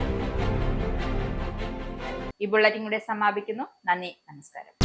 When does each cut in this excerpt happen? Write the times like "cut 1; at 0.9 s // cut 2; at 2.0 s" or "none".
none